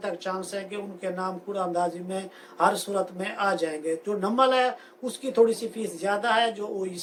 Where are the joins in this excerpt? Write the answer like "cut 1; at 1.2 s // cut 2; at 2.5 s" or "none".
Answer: none